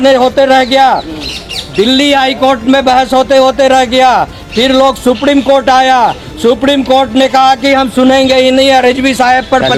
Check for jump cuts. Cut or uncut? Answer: uncut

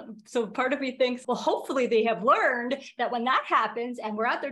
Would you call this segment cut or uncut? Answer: cut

